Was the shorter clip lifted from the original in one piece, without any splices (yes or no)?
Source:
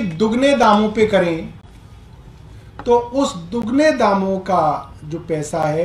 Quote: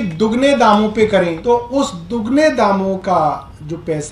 no